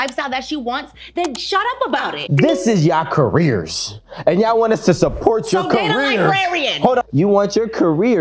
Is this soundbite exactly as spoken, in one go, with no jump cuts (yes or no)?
no